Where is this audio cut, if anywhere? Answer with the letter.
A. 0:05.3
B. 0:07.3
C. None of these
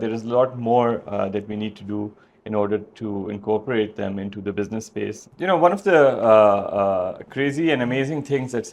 A